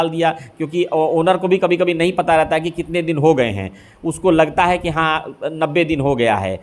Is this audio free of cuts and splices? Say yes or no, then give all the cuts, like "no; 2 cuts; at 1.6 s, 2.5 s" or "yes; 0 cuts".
yes; 0 cuts